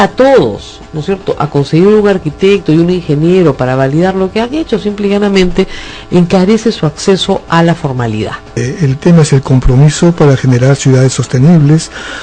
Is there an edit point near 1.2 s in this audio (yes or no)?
no